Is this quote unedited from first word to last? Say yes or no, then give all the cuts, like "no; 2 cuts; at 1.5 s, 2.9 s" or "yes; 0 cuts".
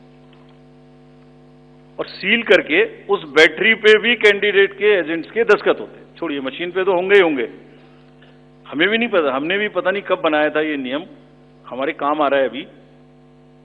yes; 0 cuts